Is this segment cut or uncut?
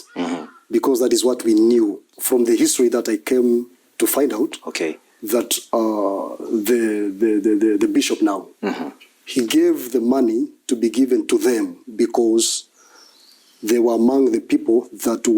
cut